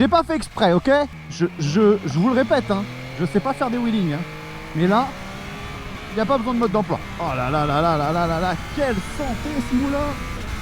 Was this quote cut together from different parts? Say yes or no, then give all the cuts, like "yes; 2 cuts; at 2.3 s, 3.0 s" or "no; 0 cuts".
yes; 2 cuts; at 1.2 s, 7.1 s